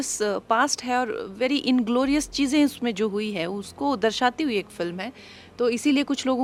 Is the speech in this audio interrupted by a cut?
no; 0 cuts

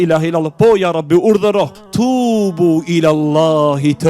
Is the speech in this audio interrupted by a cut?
yes; 1 cut; at 1.8 s

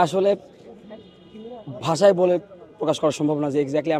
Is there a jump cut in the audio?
no; 0 cuts

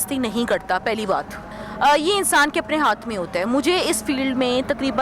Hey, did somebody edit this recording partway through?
yes; 1 cut; at 1.5 s

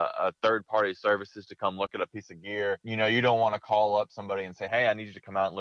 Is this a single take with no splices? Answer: yes; 0 cuts

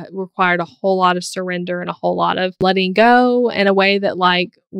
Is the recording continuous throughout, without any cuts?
no; 1 cut; at 2.6 s

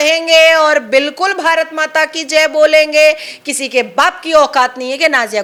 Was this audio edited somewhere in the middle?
no; 0 cuts

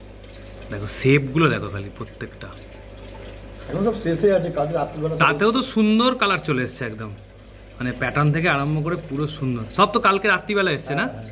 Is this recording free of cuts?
yes; 0 cuts

